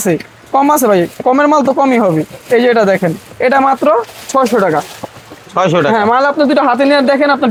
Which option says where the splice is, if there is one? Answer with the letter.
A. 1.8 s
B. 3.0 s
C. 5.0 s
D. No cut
D